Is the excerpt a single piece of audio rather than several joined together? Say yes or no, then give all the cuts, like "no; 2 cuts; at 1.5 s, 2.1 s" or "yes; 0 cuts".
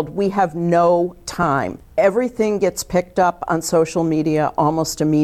no; 1 cut; at 1.8 s